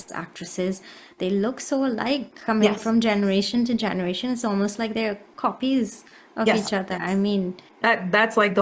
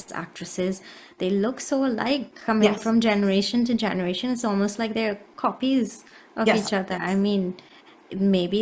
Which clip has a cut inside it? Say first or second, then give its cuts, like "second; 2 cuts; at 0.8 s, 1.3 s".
first; 1 cut; at 7.7 s